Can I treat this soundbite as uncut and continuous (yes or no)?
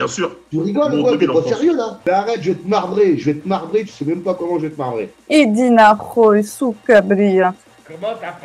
no